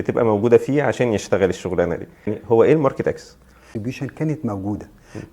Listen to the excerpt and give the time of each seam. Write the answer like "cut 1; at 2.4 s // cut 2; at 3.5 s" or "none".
cut 1; at 2.4 s // cut 2; at 3.7 s